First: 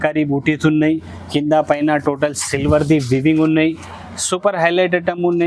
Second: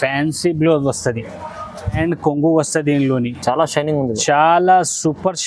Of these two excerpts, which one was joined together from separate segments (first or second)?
second